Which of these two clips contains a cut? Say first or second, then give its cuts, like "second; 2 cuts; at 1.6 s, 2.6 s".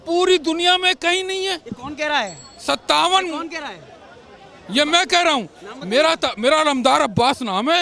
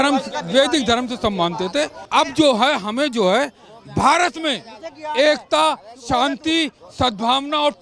second; 1 cut; at 2.0 s